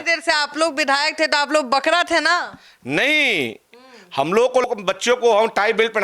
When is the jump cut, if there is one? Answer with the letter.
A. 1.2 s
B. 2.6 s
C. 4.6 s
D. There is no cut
C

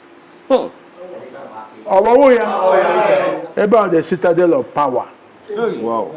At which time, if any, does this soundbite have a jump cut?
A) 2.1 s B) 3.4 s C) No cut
B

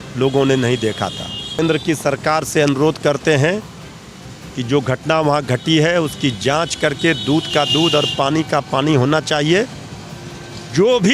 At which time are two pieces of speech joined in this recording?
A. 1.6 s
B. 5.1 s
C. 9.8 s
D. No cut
A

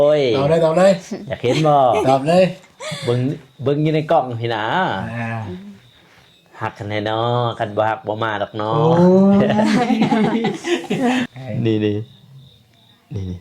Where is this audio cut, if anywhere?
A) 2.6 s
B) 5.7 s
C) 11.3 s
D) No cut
C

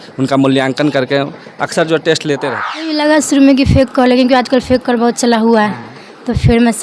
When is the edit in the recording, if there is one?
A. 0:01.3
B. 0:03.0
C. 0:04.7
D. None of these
B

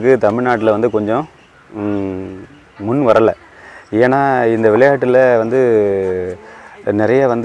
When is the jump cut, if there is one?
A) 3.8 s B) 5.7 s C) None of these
C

